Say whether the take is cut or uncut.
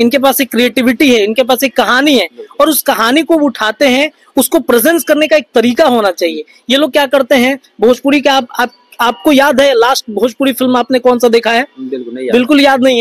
uncut